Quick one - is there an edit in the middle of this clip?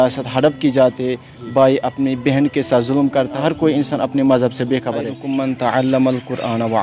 yes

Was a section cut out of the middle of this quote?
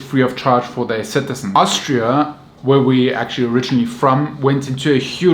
yes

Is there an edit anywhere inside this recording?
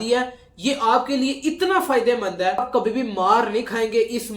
yes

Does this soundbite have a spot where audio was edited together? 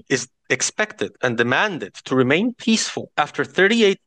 yes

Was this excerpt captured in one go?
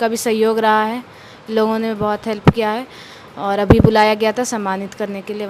yes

